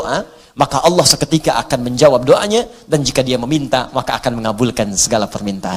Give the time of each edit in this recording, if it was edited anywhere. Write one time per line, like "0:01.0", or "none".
none